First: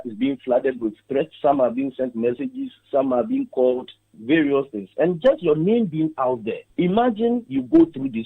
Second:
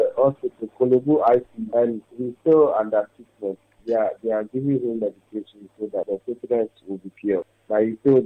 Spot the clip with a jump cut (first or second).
first